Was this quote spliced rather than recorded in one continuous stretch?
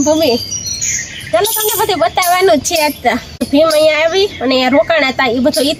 yes; 1 cut; at 3.4 s

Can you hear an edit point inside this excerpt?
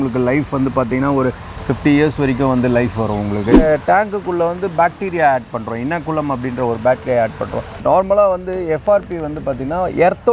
yes; 2 cuts; at 3.6 s, 7.8 s

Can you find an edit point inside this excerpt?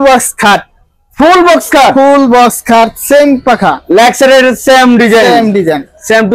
no; 0 cuts

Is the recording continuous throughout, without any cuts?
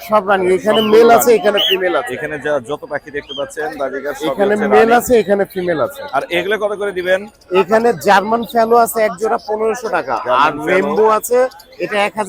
yes; 0 cuts

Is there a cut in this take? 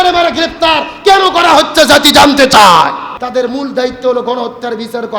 yes; 1 cut; at 3.1 s

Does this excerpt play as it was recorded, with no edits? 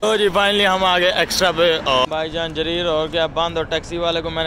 no; 1 cut; at 2.1 s

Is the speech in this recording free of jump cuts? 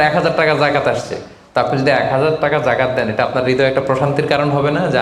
yes; 0 cuts

